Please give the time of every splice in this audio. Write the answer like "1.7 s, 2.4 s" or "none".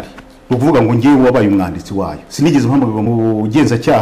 3.1 s